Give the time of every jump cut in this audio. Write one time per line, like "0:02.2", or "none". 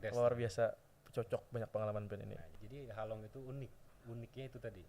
0:02.4